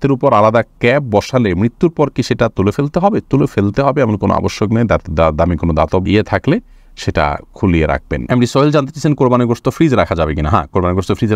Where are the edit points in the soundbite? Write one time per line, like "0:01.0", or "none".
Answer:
none